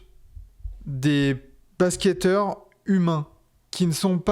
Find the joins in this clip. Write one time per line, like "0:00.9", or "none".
none